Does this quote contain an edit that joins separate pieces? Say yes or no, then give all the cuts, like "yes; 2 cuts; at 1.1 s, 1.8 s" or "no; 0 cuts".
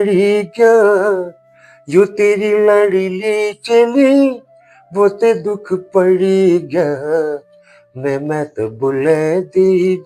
no; 0 cuts